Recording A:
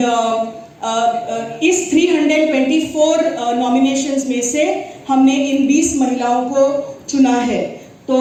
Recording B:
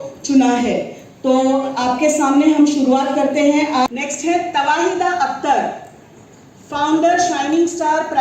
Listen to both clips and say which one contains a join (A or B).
B